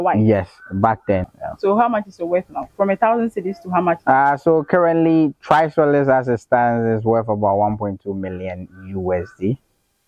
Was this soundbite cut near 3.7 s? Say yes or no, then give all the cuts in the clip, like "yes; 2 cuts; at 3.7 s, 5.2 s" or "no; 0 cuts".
no; 1 cut; at 1.4 s